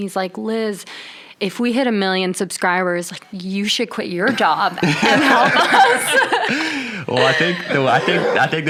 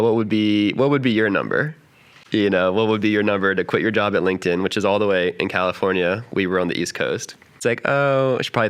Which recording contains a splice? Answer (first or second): second